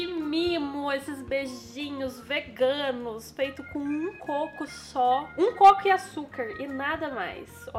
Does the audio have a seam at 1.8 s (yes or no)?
no